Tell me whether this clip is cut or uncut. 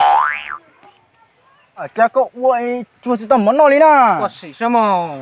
cut